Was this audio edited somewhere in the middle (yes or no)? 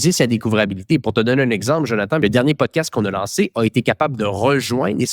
yes